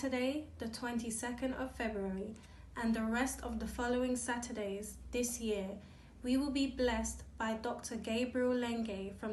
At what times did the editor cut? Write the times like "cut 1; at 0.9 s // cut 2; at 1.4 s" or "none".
none

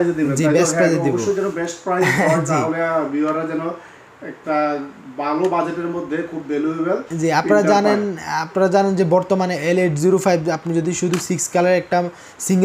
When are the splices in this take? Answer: none

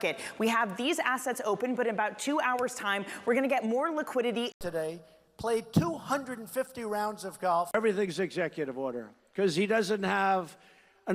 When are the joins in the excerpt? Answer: cut 1; at 4.5 s

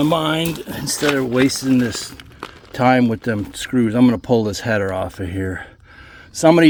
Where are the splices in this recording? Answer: none

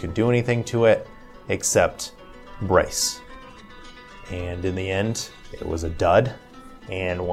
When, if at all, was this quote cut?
none

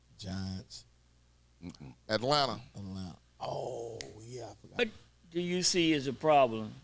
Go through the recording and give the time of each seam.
cut 1; at 4.8 s

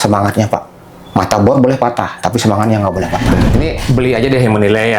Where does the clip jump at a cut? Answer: cut 1; at 3.4 s

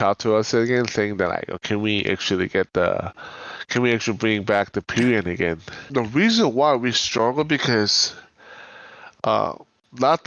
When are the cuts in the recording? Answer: cut 1; at 5.7 s

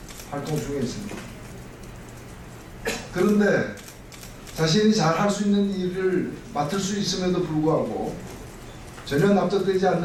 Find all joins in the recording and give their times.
none

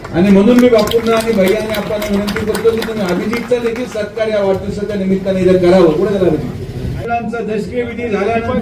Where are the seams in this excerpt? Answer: none

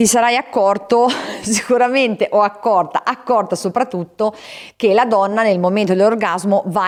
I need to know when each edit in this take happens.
none

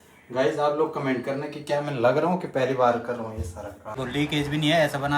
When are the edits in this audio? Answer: cut 1; at 4.0 s

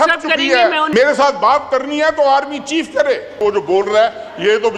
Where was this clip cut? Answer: cut 1; at 0.9 s // cut 2; at 3.4 s

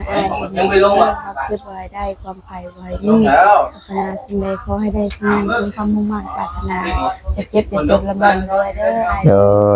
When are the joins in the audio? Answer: none

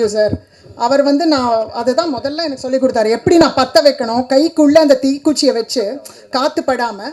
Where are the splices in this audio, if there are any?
none

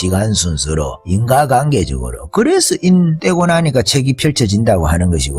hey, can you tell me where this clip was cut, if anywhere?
cut 1; at 1.0 s // cut 2; at 3.2 s

